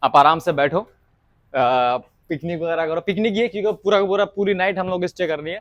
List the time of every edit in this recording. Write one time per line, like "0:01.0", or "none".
none

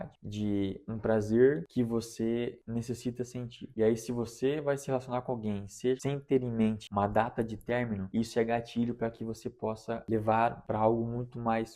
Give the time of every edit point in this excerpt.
0:06.0
0:06.8
0:08.0
0:10.0
0:10.6

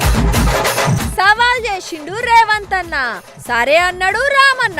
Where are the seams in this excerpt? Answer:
0:01.0

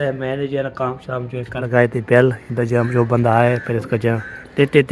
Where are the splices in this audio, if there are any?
0:01.7

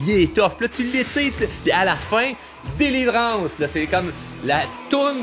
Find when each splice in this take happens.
none

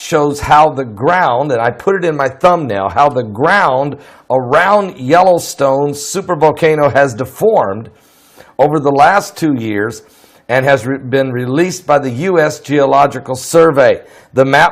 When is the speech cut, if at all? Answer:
0:02.6

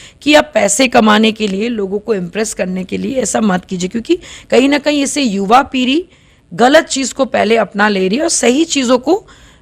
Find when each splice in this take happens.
none

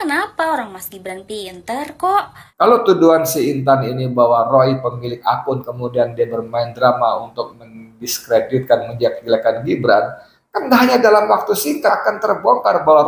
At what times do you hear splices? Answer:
0:02.4
0:12.0

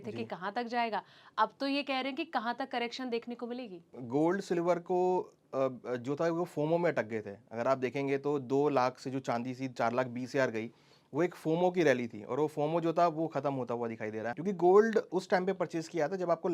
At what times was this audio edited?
0:03.9
0:14.3

